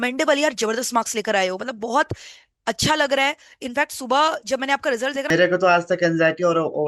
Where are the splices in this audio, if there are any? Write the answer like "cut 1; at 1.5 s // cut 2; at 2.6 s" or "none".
cut 1; at 5.3 s